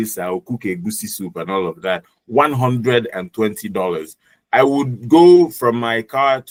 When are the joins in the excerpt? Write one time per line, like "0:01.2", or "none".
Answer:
none